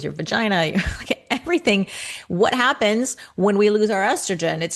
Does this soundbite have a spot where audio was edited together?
no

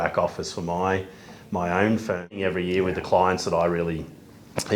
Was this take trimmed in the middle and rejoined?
yes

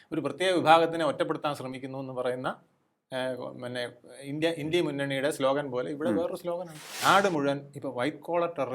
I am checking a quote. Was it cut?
yes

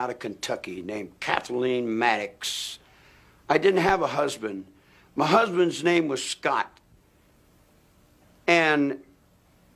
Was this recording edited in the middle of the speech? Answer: no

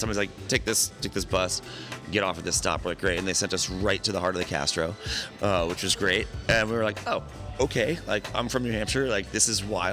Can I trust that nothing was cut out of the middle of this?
yes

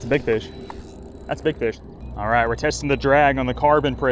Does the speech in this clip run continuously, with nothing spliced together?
no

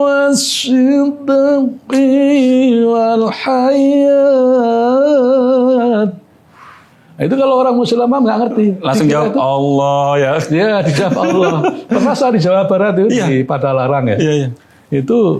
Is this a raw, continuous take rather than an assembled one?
yes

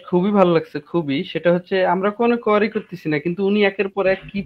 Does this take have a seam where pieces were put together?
no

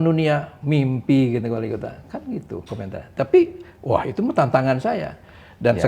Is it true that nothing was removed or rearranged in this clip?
yes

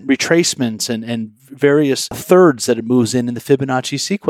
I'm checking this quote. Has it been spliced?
yes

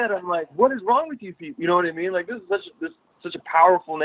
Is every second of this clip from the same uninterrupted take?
yes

